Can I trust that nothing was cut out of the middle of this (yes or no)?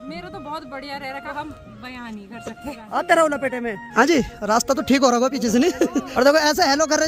no